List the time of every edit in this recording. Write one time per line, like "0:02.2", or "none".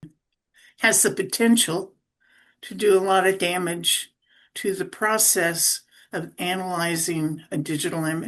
none